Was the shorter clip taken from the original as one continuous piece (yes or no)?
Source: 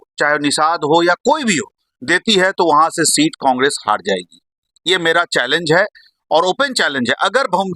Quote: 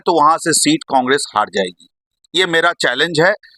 yes